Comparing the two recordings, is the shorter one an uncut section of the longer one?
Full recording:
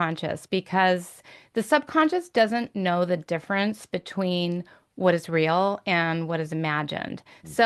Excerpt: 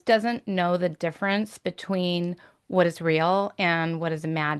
yes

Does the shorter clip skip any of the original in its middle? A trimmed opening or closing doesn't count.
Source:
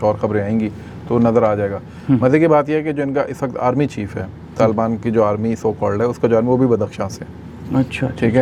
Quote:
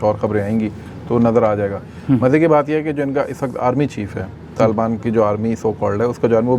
no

